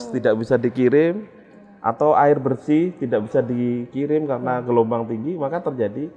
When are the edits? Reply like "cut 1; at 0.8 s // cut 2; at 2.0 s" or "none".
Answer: none